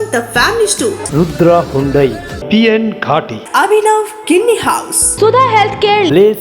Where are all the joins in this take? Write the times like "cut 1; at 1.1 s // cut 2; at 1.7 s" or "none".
cut 1; at 5.0 s